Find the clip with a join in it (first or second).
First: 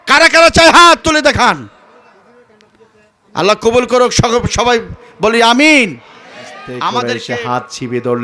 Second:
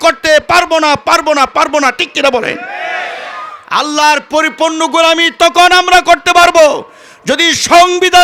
first